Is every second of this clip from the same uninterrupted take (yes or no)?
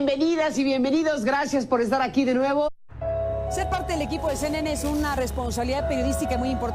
yes